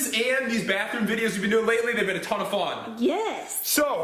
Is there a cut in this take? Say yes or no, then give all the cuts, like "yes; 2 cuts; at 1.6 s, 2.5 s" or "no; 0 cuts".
no; 0 cuts